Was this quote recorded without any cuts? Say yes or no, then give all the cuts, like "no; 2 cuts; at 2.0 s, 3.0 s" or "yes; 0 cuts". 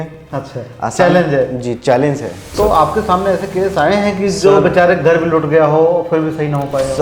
no; 1 cut; at 2.6 s